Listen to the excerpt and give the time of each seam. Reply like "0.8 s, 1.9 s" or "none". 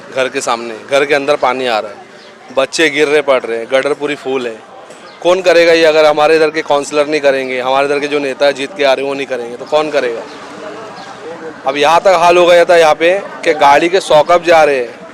none

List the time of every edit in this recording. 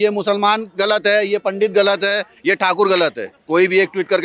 none

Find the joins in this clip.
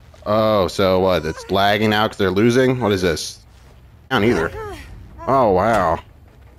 4.1 s

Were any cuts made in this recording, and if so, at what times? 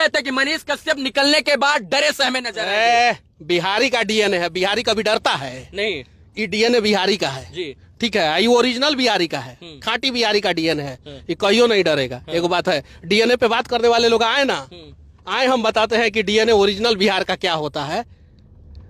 none

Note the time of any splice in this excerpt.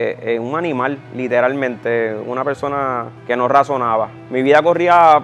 3.1 s, 4.2 s

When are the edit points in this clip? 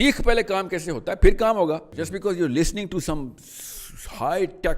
1.9 s

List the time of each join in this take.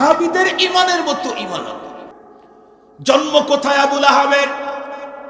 2.2 s

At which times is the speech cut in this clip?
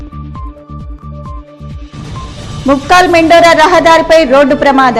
none

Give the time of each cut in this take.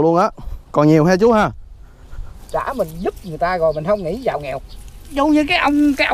2.3 s, 5.1 s

